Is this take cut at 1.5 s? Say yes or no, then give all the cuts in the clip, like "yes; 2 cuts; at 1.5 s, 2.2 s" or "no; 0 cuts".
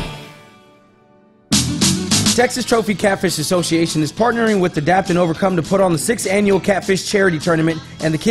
yes; 1 cut; at 1.5 s